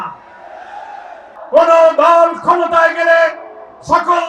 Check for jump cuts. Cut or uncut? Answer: cut